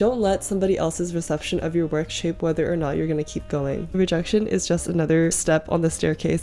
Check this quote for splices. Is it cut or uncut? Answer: cut